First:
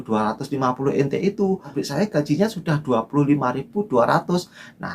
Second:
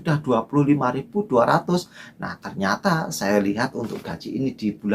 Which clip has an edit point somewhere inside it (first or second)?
first